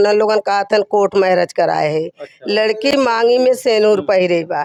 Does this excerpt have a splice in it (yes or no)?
no